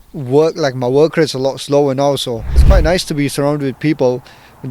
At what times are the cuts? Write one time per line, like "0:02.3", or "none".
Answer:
0:02.6